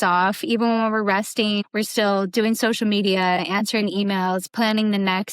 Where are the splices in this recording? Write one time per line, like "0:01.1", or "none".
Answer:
0:01.6